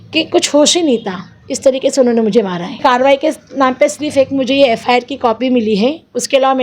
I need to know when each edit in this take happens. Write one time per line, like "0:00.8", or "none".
0:02.8